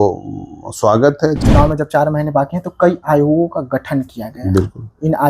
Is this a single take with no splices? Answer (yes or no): no